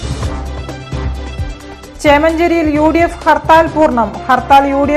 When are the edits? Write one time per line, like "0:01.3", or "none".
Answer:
0:01.5